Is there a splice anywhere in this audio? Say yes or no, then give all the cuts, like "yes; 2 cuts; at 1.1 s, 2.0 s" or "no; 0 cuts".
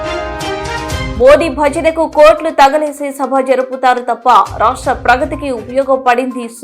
yes; 1 cut; at 1.1 s